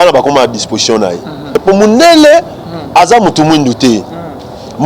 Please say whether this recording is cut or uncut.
cut